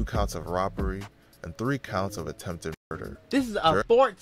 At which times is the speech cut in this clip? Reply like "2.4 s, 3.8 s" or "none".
none

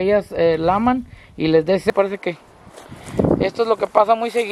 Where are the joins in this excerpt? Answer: 1.9 s

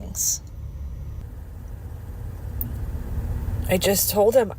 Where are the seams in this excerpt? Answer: 1.2 s

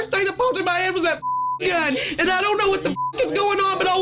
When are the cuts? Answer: 2.0 s

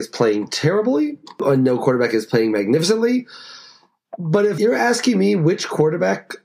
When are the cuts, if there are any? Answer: 1.4 s, 4.6 s

